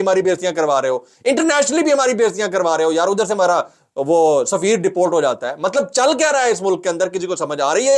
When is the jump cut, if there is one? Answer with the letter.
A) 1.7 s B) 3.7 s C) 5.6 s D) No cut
D